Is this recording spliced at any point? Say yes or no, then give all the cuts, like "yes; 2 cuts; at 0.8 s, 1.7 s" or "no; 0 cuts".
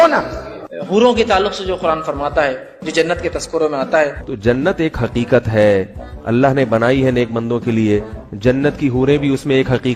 no; 0 cuts